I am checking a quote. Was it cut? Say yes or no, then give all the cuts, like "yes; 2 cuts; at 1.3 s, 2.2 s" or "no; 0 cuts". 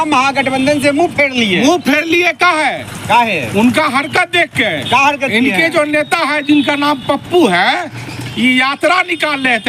no; 0 cuts